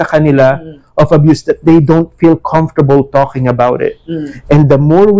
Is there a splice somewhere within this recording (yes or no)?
no